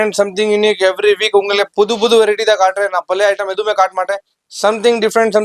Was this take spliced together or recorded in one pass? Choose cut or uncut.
uncut